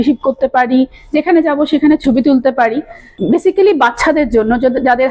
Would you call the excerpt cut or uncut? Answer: cut